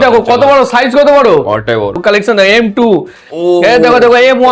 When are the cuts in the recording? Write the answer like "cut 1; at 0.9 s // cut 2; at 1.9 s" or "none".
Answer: cut 1; at 2.0 s